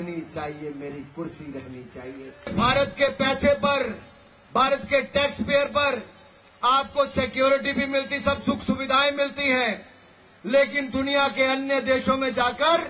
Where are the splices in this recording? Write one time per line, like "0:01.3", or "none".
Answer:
0:02.5